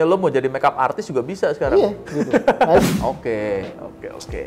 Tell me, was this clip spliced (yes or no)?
yes